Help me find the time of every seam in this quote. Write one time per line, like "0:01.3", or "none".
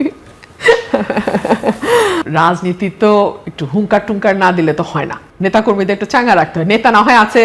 0:02.2